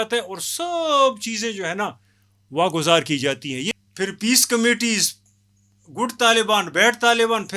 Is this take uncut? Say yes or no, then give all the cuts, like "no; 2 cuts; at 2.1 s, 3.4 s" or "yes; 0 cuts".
no; 1 cut; at 3.7 s